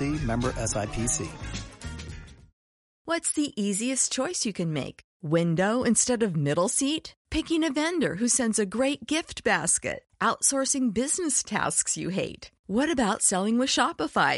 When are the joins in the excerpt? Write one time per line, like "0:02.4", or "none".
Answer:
0:03.0